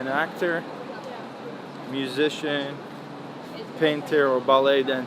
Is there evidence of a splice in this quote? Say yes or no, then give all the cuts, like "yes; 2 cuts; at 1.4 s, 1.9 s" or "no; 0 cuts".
no; 0 cuts